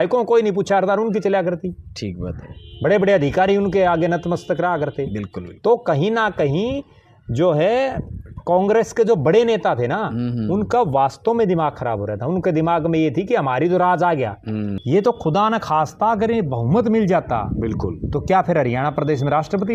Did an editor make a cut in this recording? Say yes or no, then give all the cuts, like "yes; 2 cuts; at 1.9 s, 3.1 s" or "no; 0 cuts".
yes; 1 cut; at 14.7 s